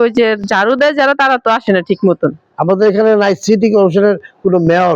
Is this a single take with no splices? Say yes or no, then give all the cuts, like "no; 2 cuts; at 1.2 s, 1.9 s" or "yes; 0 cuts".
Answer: no; 1 cut; at 2.4 s